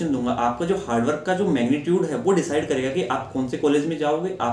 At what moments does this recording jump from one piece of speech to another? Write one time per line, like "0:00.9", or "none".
none